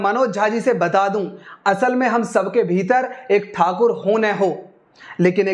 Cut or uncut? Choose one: uncut